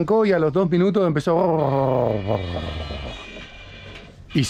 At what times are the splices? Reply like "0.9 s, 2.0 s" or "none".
none

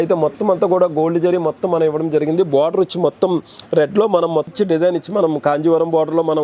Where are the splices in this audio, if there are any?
4.5 s

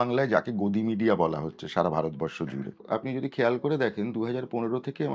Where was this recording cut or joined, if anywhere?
2.8 s

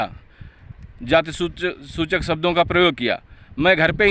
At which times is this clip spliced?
none

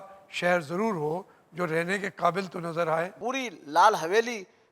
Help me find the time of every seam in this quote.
3.1 s

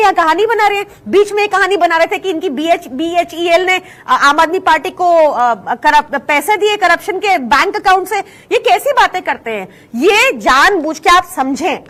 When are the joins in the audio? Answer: none

